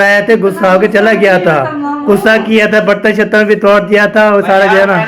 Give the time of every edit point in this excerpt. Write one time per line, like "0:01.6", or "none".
none